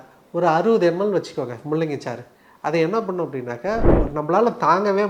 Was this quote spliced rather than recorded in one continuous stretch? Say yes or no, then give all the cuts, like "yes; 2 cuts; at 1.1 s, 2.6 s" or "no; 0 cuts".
yes; 1 cut; at 3.9 s